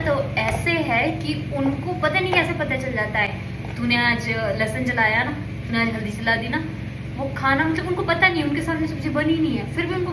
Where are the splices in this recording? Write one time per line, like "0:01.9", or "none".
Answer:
none